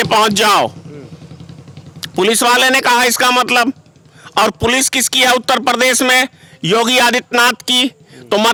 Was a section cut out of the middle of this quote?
no; 0 cuts

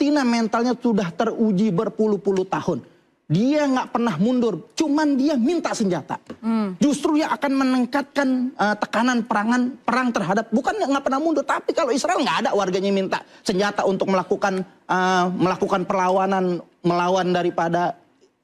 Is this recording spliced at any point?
no; 0 cuts

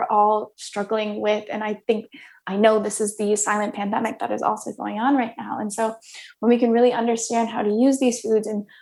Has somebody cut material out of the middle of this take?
no; 0 cuts

